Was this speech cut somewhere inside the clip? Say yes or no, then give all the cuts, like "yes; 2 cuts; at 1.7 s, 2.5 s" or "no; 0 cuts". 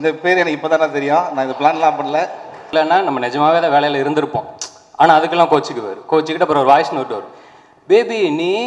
yes; 1 cut; at 2.7 s